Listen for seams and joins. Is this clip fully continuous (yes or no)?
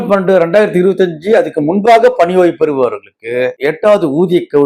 no